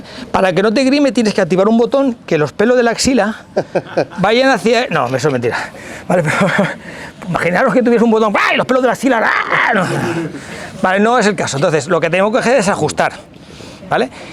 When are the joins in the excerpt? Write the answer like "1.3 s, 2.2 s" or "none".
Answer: none